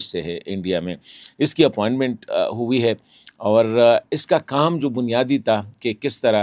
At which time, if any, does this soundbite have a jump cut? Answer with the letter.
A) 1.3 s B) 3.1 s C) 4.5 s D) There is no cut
D